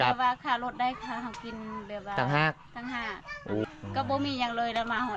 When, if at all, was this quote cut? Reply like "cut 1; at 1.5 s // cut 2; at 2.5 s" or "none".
cut 1; at 3.6 s